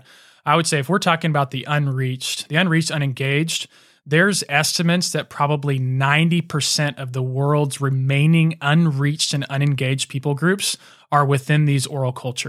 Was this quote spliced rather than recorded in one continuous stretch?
no; 0 cuts

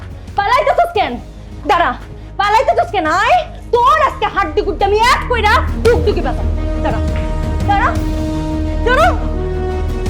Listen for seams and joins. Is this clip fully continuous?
yes; 0 cuts

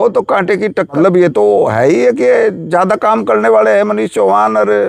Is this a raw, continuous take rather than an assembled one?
no; 1 cut; at 0.9 s

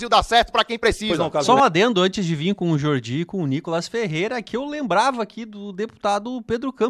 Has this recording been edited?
no; 0 cuts

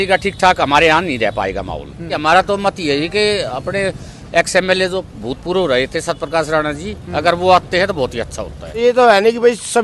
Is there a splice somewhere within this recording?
yes; 2 cuts; at 2.2 s, 8.8 s

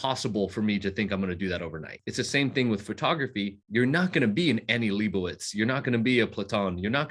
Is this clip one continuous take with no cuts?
no; 2 cuts; at 2.0 s, 3.6 s

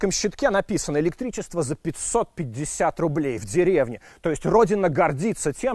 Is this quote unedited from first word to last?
yes; 0 cuts

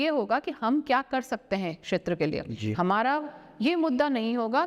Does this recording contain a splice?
no; 0 cuts

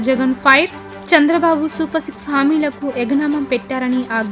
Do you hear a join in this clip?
no; 0 cuts

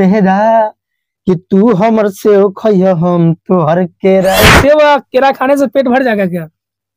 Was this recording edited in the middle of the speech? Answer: yes; 1 cut; at 4.4 s

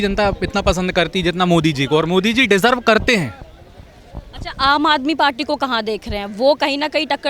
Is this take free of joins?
yes; 0 cuts

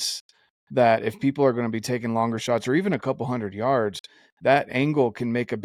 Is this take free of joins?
yes; 0 cuts

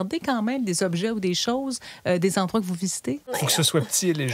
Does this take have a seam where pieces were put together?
yes; 1 cut; at 3.4 s

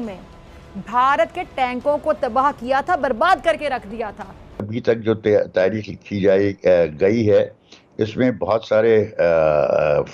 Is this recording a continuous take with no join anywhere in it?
no; 1 cut; at 4.7 s

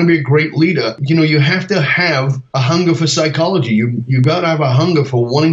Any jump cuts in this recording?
yes; 2 cuts; at 1.0 s, 2.4 s

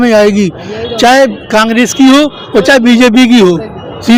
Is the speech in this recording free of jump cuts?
yes; 0 cuts

